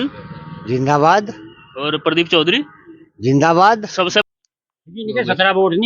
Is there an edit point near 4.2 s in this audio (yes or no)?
yes